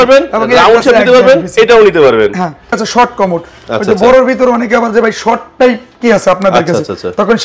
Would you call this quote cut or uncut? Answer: cut